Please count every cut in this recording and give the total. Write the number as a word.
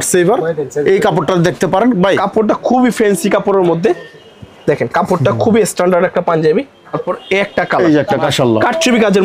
three